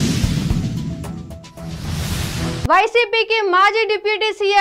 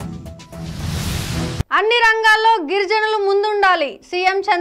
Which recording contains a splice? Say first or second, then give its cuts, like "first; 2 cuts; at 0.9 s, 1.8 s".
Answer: second; 1 cut; at 1.3 s